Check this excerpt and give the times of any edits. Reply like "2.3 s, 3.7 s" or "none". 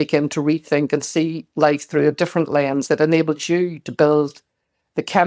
2.8 s